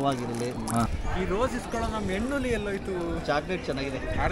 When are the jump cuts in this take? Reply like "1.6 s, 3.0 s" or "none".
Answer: 1.0 s